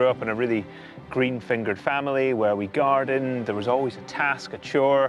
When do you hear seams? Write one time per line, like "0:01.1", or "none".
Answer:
0:04.0